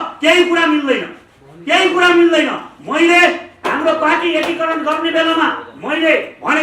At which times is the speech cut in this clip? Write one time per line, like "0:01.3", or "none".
none